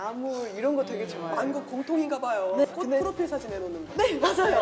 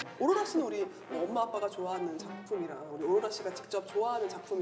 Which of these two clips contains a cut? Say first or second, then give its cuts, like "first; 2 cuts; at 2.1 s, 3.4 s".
first; 1 cut; at 2.6 s